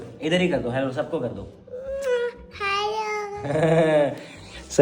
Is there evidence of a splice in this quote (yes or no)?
no